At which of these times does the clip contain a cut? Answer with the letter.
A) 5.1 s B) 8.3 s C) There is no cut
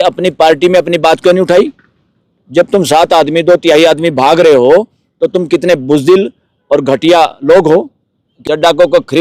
B